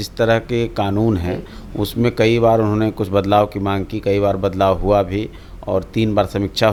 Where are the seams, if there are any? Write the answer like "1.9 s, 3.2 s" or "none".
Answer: none